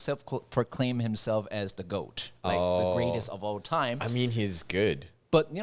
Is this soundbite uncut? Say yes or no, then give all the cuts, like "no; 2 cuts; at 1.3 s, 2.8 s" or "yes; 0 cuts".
yes; 0 cuts